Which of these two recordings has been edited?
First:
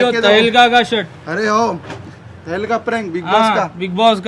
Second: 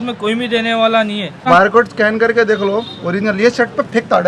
second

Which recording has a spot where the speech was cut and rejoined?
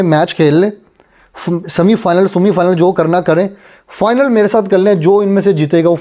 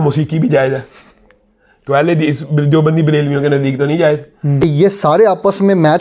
second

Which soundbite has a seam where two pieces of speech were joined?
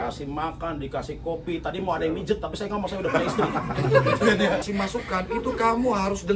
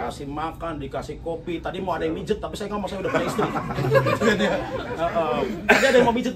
first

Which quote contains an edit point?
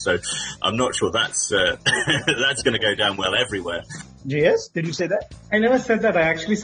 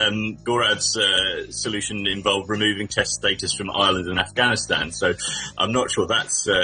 first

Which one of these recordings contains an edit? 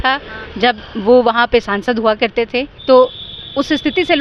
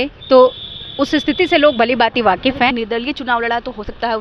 second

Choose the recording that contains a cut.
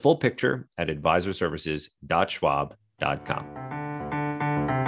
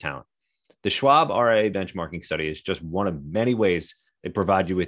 first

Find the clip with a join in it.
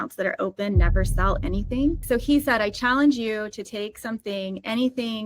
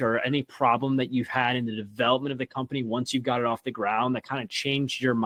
first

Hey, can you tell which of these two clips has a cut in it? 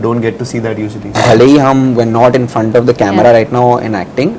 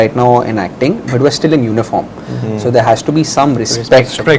first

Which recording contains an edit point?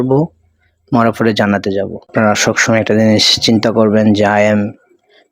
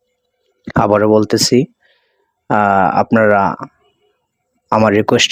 first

